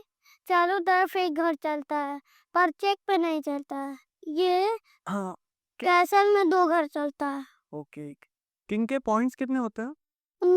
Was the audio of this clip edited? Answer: no; 0 cuts

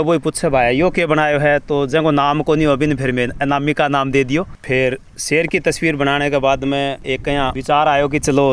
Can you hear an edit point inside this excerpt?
yes; 1 cut; at 4.5 s

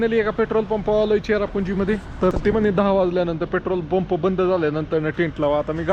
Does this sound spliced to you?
yes; 1 cut; at 2.3 s

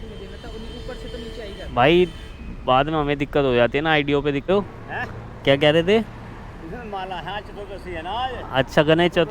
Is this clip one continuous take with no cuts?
no; 1 cut; at 4.5 s

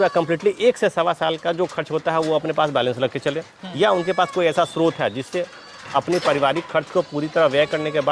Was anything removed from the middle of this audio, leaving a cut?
no; 0 cuts

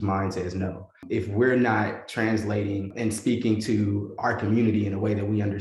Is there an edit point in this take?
yes; 2 cuts; at 1.0 s, 2.9 s

